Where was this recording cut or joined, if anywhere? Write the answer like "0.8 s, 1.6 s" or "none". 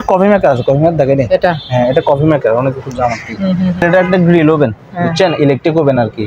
3.8 s